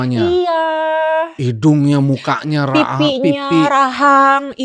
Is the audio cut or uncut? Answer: uncut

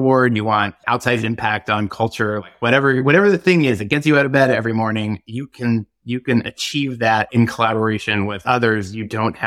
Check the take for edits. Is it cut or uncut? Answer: cut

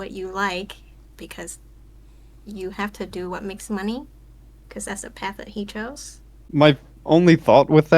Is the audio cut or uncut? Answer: cut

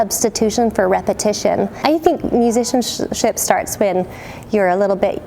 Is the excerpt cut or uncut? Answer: cut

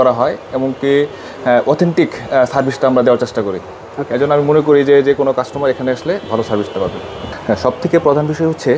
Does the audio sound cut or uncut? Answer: uncut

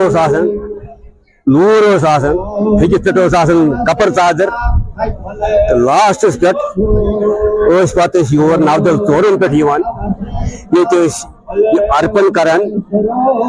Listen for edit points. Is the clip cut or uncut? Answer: uncut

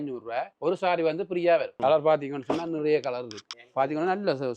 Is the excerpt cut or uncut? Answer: cut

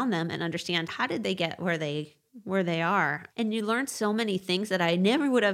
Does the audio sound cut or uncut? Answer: cut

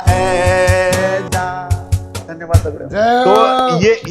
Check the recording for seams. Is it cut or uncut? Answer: cut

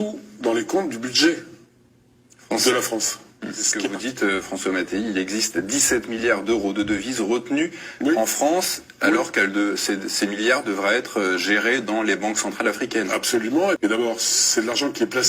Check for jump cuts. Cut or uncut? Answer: cut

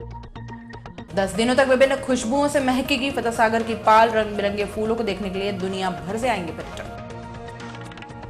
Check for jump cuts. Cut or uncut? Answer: uncut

